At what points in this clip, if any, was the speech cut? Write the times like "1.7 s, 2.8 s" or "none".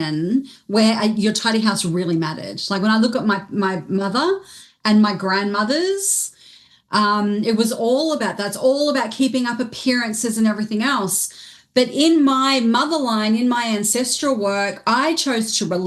none